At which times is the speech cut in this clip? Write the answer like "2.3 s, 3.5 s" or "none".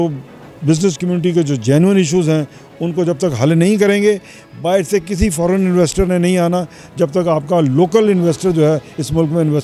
none